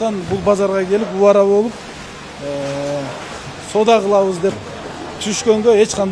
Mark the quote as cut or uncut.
uncut